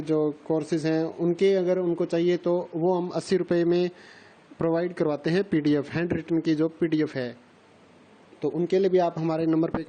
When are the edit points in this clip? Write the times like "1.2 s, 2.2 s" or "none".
1.4 s